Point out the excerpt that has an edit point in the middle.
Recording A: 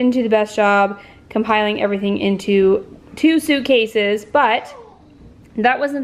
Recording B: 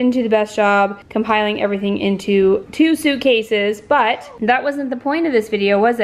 B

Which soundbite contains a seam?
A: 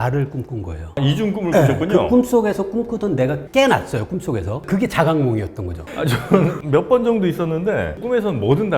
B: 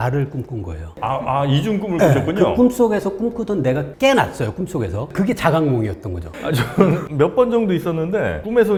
A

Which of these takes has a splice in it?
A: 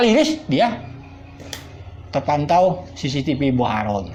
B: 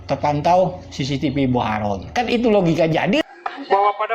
B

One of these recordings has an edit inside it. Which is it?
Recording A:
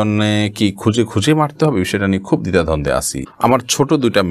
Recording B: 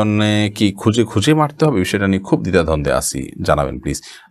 A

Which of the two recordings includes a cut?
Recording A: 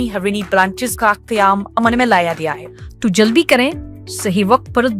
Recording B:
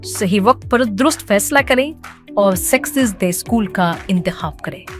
A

